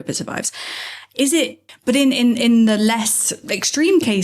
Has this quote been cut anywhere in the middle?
yes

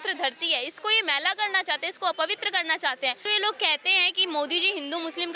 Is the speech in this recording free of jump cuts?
no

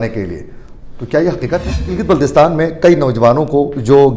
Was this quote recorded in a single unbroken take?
no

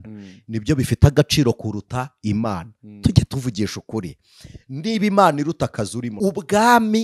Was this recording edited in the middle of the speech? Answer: yes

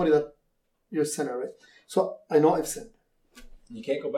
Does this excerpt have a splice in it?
no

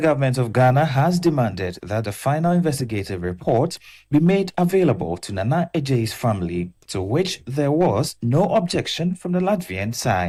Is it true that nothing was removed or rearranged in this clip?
yes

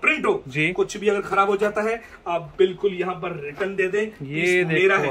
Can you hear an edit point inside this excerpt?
no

